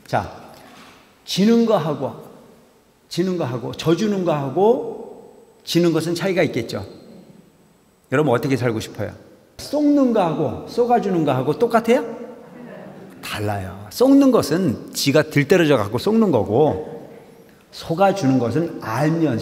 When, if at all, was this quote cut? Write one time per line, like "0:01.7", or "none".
0:09.6